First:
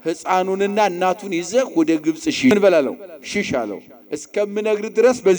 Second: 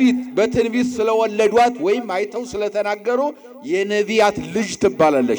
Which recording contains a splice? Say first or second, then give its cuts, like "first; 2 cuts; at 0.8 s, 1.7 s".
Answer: first; 1 cut; at 2.5 s